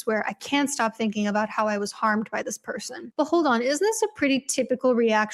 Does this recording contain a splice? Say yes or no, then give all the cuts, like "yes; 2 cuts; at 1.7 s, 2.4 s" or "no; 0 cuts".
no; 0 cuts